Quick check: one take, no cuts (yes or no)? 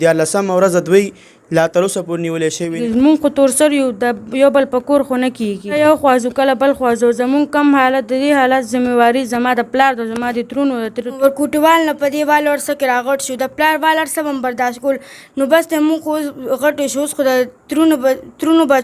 no